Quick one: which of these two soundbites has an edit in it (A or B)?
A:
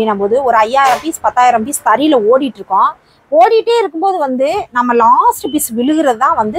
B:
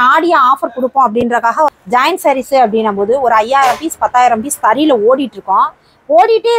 B